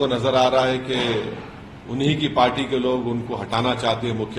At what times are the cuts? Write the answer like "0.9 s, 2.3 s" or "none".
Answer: none